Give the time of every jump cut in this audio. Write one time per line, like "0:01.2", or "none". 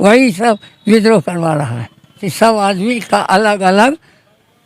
0:02.3